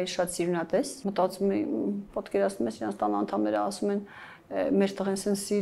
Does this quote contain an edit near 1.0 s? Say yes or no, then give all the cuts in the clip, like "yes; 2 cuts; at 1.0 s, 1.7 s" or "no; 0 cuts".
yes; 1 cut; at 1.0 s